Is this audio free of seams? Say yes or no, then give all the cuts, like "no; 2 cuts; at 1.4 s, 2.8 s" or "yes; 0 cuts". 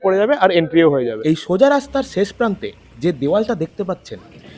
no; 1 cut; at 1.1 s